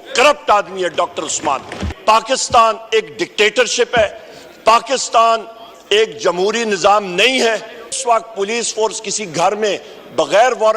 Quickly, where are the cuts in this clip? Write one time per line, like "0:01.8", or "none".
0:01.9
0:08.0